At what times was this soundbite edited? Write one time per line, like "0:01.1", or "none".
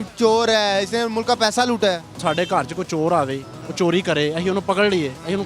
0:02.2

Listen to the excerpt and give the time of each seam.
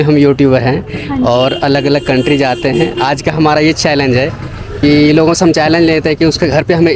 none

